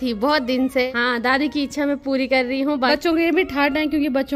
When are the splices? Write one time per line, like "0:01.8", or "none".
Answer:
0:00.9
0:02.9